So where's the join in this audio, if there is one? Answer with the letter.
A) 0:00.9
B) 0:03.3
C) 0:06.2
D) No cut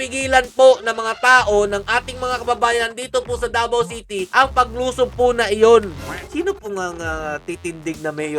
C